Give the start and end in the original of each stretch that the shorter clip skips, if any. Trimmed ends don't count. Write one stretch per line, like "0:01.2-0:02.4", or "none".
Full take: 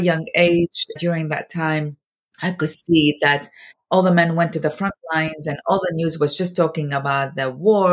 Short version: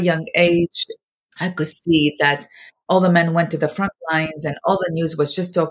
0:00.9-0:01.9